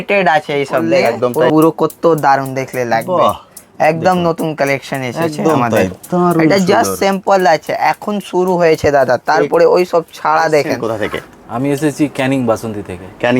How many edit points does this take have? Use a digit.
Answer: 2